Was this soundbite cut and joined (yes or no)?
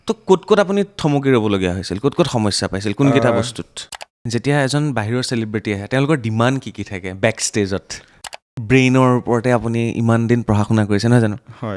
yes